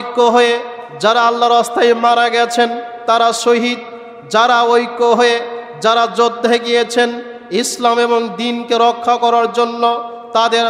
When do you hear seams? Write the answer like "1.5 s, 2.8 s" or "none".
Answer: none